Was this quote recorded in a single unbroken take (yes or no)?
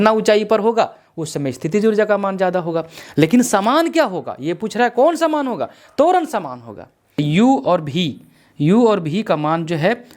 no